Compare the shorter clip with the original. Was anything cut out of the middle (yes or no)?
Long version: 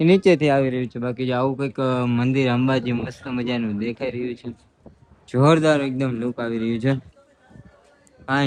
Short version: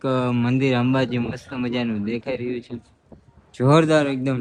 no